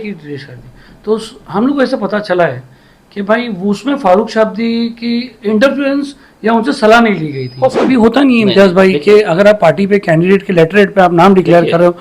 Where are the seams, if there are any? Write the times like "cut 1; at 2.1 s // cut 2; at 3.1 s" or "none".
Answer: cut 1; at 7.8 s